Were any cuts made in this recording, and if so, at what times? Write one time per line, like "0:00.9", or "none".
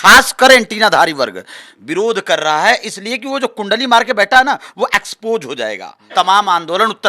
0:05.9